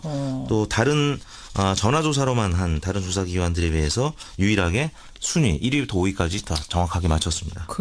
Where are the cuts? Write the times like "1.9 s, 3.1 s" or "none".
5.3 s